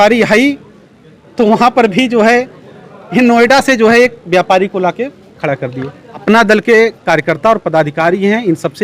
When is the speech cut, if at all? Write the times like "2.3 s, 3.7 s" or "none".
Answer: 6.1 s